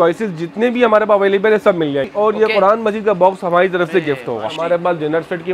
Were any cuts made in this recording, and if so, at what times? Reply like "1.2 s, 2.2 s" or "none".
2.1 s, 4.6 s